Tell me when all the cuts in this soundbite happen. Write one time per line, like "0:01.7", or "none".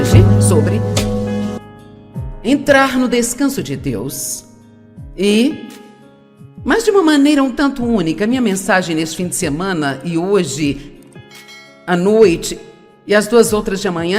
0:01.6